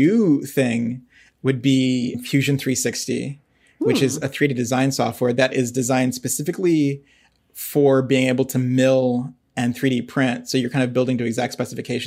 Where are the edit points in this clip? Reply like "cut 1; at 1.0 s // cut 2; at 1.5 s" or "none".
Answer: cut 1; at 2.2 s